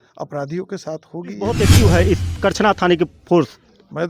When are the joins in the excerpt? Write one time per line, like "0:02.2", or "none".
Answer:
0:01.5

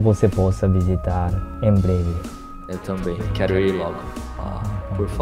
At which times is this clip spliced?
none

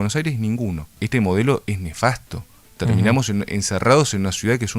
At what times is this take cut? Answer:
0:00.9

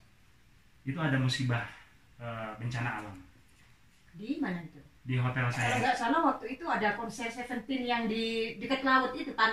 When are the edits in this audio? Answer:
0:05.6

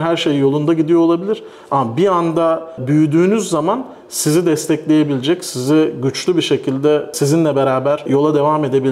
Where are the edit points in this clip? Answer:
0:02.8
0:07.1
0:08.1

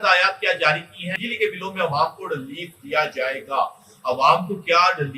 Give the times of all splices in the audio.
0:01.1

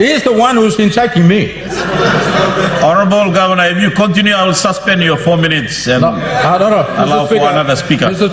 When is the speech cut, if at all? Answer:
none

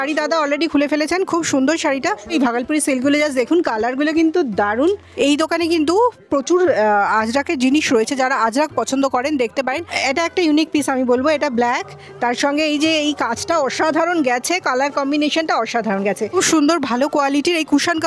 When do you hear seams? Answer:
0:02.3
0:05.1
0:09.9
0:16.3

